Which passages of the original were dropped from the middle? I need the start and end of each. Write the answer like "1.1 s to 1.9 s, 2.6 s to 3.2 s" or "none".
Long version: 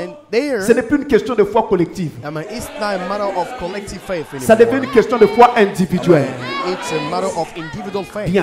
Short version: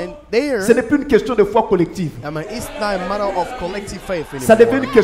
none